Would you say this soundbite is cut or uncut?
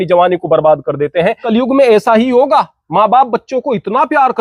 cut